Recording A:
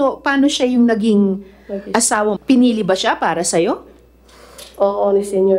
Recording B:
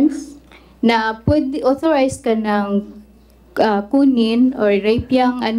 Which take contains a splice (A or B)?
A